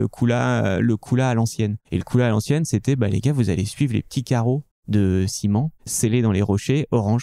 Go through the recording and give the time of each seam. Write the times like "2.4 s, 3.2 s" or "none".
1.8 s, 4.7 s, 5.8 s

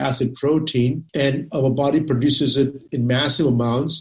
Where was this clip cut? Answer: 1.0 s, 2.8 s

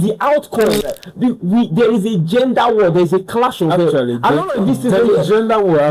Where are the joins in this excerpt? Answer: 0.9 s

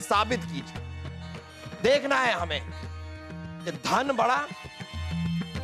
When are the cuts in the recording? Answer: 4.5 s

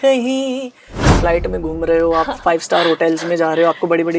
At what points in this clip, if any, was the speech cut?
1.1 s

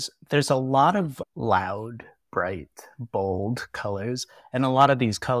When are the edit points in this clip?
1.2 s

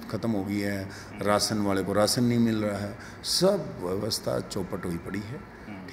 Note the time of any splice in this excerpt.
none

